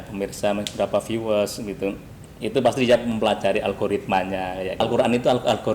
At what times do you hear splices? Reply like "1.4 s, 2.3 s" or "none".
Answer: 4.8 s